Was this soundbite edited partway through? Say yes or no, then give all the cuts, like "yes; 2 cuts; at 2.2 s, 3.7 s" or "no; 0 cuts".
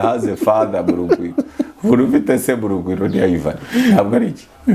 no; 0 cuts